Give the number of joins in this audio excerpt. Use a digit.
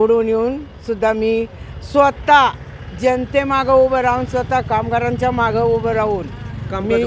0